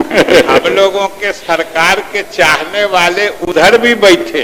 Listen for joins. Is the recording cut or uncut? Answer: uncut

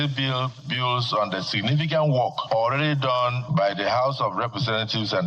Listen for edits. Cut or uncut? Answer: cut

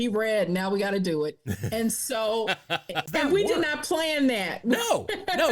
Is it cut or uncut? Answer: cut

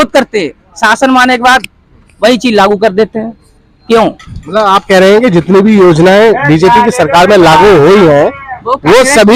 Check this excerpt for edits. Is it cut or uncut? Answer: uncut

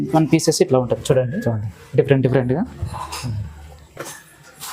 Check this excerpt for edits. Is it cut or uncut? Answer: uncut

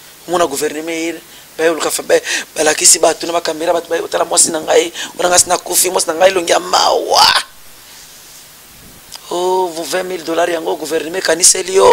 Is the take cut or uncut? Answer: uncut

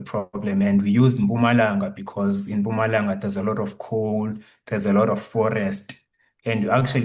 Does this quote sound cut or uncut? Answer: uncut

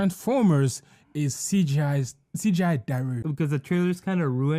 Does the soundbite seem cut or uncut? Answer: uncut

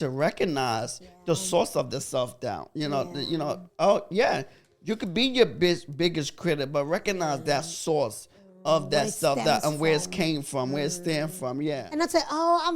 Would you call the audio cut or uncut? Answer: cut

